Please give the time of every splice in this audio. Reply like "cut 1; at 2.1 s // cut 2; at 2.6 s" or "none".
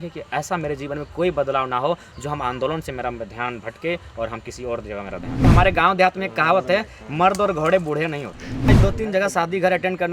cut 1; at 5.4 s // cut 2; at 8.7 s